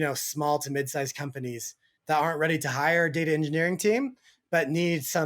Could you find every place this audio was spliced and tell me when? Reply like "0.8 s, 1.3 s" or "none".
1.9 s